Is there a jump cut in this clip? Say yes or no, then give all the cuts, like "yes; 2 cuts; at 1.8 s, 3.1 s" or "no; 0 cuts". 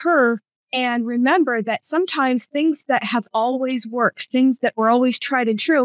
yes; 1 cut; at 4.8 s